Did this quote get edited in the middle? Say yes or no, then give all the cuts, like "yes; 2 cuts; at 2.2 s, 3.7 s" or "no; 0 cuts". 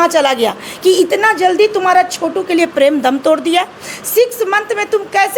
no; 0 cuts